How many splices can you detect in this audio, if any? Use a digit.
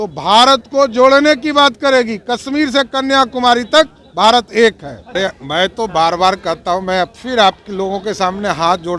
1